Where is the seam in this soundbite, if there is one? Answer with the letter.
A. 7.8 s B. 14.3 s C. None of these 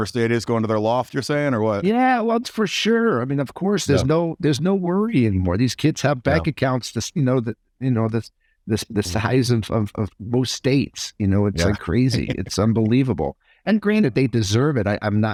C